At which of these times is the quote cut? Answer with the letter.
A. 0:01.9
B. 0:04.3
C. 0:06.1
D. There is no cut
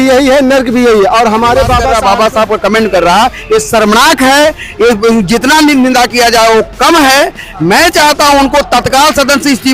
A